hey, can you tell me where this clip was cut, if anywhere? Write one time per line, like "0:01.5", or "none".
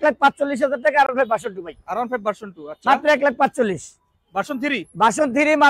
none